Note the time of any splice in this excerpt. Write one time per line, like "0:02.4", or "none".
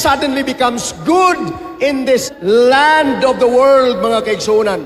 0:02.3